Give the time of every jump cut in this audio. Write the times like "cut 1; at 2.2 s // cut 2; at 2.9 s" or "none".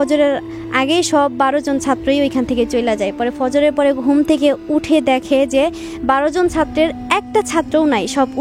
none